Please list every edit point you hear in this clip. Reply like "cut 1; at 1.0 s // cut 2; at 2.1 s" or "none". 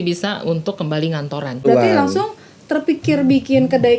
cut 1; at 1.6 s